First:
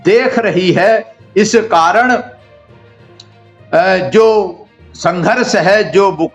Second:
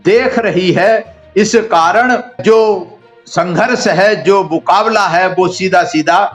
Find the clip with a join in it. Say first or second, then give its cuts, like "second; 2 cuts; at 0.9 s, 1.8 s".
second; 1 cut; at 2.4 s